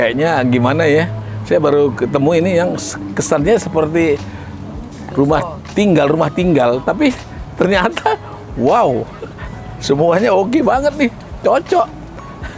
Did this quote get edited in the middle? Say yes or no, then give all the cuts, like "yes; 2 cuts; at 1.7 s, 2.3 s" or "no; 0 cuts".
no; 0 cuts